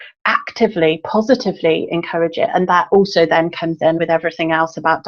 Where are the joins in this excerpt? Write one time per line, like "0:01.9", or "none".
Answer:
0:02.9
0:04.0

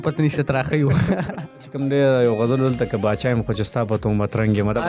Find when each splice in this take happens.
0:01.7

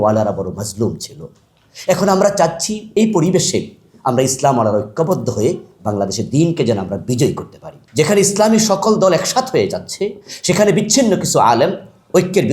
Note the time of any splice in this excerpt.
0:07.8

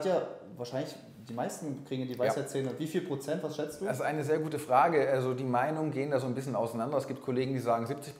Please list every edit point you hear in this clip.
none

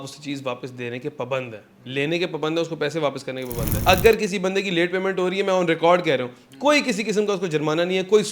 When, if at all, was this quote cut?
0:03.7

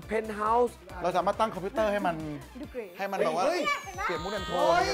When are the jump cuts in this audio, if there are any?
0:01.0

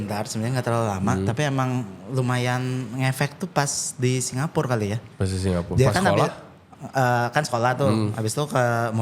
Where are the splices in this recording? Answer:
none

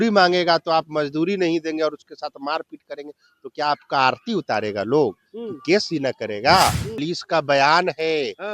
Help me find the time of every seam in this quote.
0:06.9

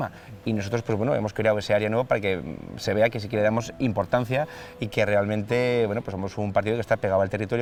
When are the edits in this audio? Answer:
none

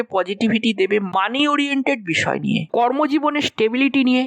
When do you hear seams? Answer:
0:02.7

